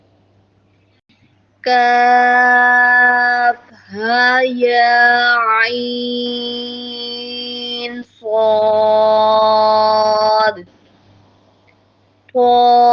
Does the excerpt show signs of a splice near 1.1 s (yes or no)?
yes